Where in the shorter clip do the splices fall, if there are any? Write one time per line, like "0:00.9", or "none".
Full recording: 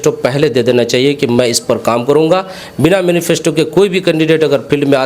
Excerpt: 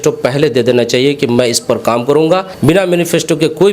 0:02.5